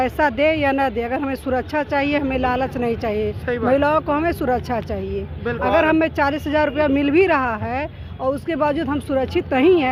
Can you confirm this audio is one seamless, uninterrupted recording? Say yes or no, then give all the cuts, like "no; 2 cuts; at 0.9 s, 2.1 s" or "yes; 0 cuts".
yes; 0 cuts